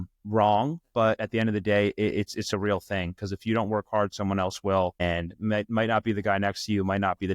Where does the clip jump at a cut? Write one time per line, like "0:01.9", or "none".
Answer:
0:05.0